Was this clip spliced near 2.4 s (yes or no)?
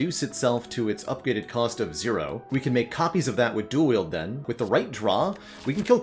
yes